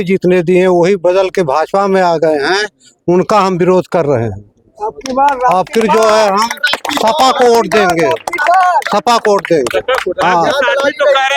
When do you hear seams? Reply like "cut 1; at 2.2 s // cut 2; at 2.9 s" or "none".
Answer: none